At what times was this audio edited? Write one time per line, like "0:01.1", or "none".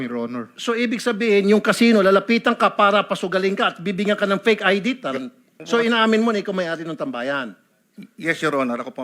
0:05.5